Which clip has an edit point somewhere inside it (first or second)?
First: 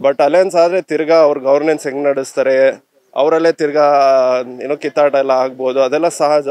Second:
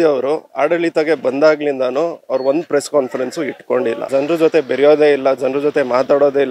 second